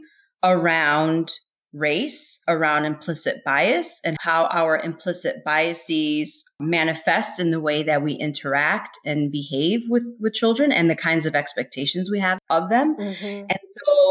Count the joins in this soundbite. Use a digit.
2